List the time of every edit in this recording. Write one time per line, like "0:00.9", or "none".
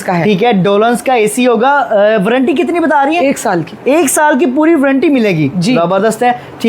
none